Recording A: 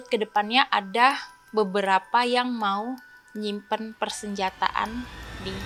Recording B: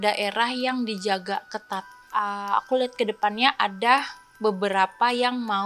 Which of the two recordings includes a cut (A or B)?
B